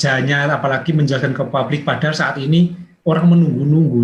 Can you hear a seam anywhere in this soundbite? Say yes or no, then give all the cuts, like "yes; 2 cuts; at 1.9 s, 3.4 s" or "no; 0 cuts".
yes; 1 cut; at 2.9 s